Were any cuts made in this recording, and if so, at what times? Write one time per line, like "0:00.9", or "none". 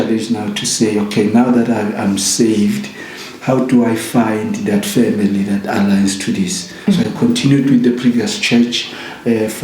none